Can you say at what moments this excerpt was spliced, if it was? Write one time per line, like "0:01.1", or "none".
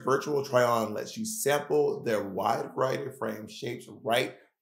none